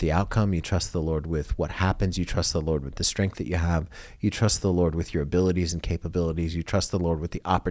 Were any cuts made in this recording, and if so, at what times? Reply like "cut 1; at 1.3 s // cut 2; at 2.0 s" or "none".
none